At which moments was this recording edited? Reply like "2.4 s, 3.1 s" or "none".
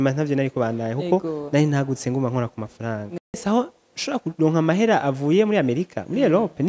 3.4 s